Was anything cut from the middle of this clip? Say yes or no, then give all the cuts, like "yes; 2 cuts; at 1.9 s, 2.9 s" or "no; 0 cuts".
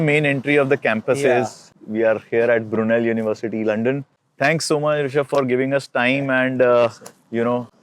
yes; 1 cut; at 1.8 s